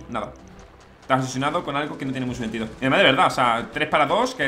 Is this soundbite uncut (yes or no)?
yes